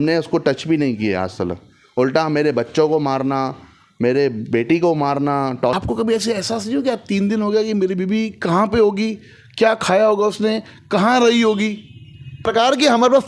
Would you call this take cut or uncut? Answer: cut